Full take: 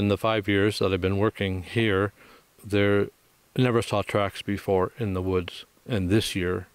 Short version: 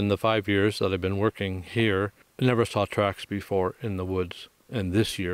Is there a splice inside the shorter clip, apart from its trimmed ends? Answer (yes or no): yes